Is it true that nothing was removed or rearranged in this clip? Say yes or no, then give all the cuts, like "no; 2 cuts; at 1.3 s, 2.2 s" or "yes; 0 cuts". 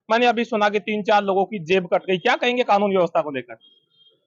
yes; 0 cuts